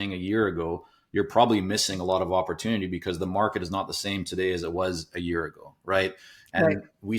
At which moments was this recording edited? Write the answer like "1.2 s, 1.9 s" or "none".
none